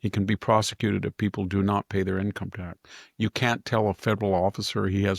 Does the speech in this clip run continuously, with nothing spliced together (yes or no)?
yes